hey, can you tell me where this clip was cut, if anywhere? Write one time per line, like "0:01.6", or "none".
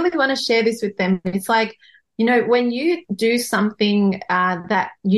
none